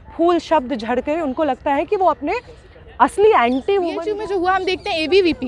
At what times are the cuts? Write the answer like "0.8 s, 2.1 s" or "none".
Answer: 4.1 s